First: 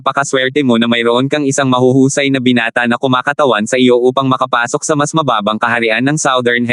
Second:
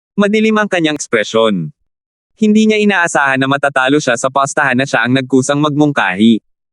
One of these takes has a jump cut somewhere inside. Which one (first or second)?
second